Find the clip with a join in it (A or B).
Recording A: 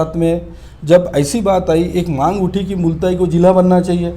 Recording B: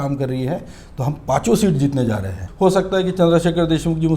B